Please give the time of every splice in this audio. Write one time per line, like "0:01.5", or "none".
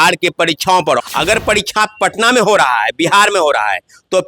0:01.0